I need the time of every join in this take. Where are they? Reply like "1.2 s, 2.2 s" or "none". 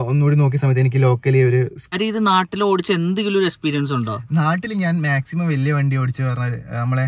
1.9 s